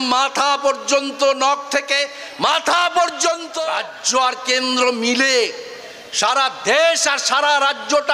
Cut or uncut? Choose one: cut